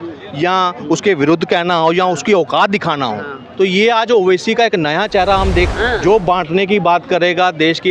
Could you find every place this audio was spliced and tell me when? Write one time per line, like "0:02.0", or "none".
0:05.7